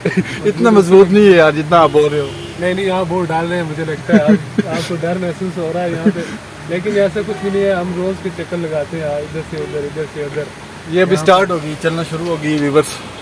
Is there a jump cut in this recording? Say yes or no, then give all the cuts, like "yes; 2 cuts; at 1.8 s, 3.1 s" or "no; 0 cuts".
no; 0 cuts